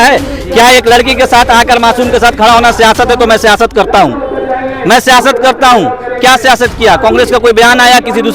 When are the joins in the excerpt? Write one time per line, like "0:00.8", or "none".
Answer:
none